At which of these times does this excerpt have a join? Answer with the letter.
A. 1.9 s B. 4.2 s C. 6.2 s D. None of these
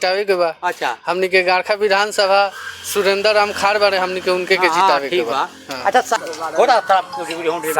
C